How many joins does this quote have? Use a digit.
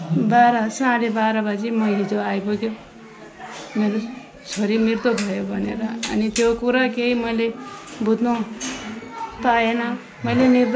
0